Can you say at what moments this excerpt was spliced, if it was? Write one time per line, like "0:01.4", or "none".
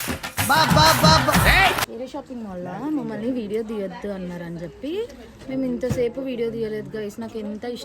0:01.9

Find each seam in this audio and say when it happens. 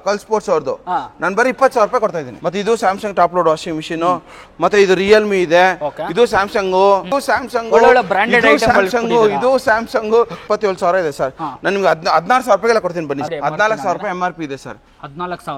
0:02.3
0:07.1
0:10.4
0:13.2

